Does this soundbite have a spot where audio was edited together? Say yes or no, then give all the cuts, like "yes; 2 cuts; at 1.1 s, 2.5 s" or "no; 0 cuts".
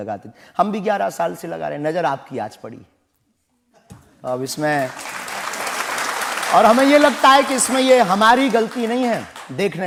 no; 0 cuts